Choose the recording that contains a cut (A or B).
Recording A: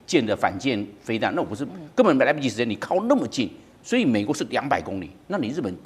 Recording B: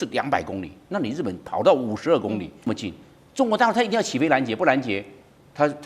B